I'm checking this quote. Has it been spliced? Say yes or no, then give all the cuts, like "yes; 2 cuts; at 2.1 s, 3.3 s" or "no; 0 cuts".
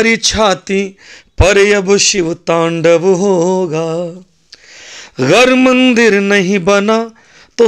no; 0 cuts